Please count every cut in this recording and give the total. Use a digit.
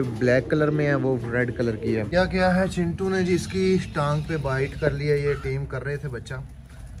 1